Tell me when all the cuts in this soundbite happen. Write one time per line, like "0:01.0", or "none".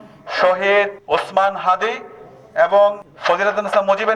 0:01.0
0:03.1